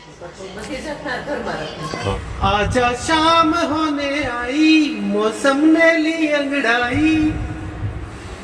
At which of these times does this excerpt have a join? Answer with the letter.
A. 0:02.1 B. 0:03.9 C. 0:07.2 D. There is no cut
A